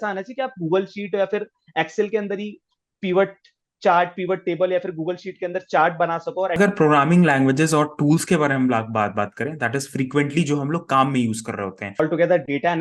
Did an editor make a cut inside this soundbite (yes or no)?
yes